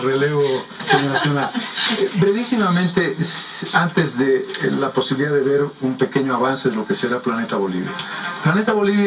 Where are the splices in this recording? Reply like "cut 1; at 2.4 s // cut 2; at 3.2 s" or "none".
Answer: cut 1; at 7.7 s

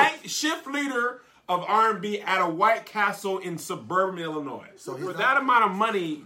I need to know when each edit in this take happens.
cut 1; at 5.1 s

